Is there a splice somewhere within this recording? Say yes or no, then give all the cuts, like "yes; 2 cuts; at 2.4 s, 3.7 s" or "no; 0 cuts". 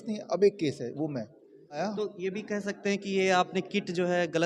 yes; 1 cut; at 1.8 s